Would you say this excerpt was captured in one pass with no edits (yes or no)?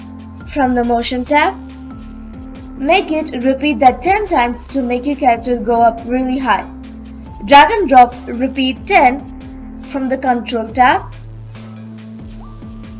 yes